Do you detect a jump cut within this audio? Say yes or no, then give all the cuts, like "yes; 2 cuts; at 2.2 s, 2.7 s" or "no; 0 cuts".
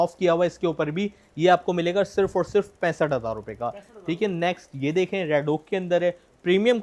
no; 0 cuts